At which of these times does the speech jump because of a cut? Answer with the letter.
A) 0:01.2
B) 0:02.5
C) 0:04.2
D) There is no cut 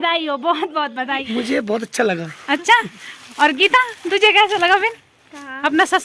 A